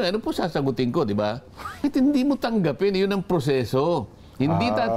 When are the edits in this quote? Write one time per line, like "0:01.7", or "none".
0:01.8